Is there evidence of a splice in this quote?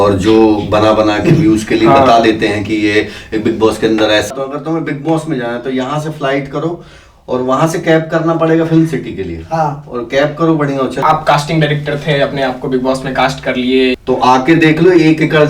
yes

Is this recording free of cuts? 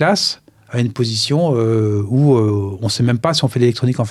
yes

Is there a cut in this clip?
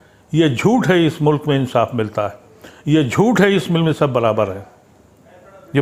no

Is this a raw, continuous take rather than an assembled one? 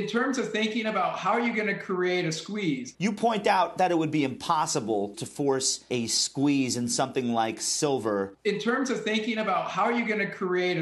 no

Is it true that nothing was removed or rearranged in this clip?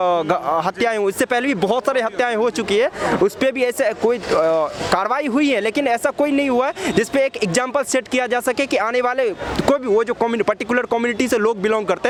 yes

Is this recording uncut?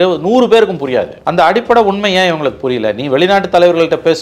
no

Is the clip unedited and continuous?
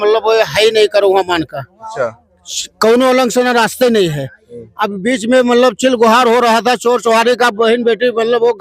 yes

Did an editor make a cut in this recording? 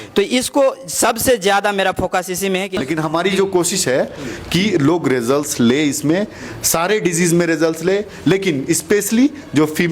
yes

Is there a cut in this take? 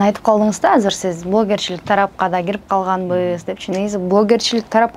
no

